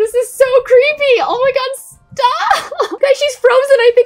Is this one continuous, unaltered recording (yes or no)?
no